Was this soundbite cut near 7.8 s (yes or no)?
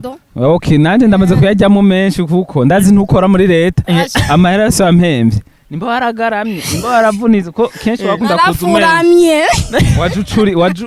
no